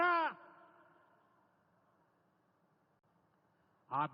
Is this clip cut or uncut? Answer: cut